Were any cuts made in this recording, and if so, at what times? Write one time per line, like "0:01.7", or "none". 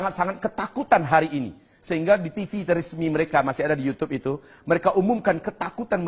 none